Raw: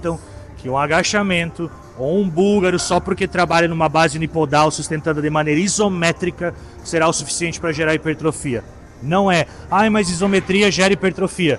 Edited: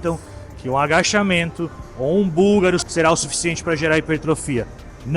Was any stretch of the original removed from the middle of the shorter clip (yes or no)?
yes